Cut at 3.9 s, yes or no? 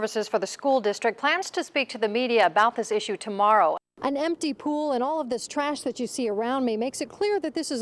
yes